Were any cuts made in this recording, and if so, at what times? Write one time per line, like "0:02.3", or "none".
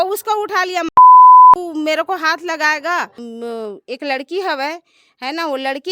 0:01.0
0:01.6
0:03.2